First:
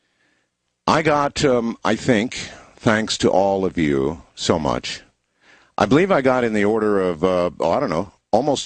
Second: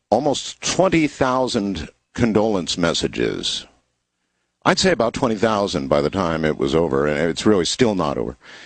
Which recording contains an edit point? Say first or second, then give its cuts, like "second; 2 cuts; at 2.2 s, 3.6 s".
first; 1 cut; at 5.9 s